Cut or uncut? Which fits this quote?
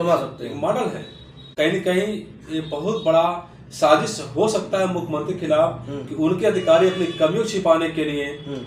cut